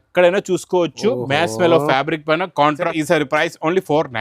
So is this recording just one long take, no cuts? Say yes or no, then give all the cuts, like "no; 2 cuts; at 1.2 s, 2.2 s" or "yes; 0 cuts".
no; 1 cut; at 2.9 s